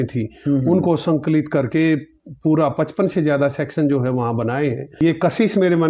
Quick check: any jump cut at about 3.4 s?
no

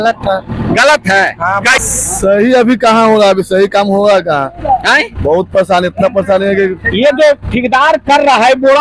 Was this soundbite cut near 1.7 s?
yes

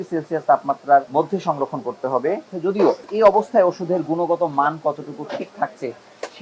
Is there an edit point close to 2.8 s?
yes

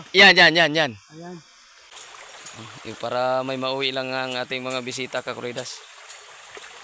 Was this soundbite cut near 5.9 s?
no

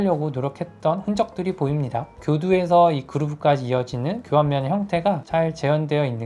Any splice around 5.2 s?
no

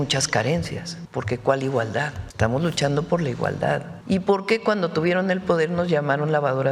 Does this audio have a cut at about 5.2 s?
no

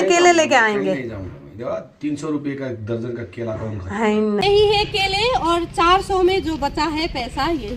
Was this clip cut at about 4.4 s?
yes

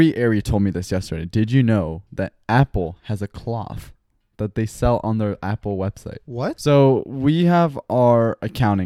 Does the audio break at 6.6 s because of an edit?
yes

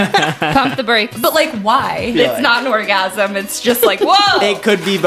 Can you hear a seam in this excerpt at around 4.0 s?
no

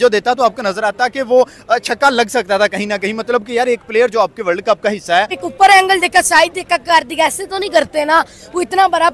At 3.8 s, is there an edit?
no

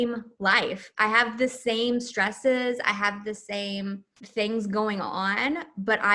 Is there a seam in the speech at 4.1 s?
yes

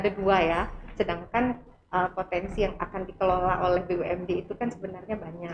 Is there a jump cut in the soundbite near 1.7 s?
no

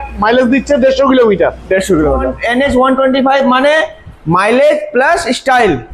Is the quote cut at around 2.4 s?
yes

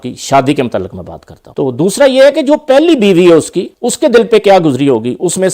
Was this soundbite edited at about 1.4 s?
yes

